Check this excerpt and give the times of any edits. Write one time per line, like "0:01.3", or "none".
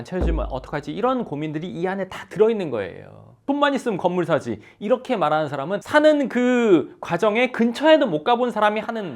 0:03.3
0:05.8